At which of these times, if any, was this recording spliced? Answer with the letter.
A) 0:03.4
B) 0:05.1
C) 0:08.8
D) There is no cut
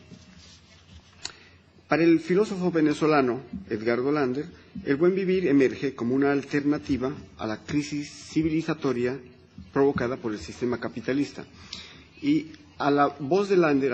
C